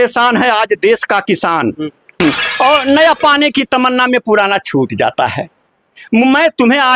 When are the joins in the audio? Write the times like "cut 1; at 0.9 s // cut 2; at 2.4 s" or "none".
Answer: cut 1; at 2.0 s